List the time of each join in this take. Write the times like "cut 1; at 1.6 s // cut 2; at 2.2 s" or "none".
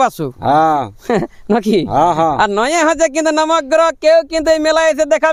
none